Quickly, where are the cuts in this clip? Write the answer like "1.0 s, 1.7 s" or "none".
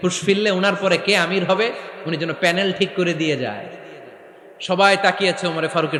none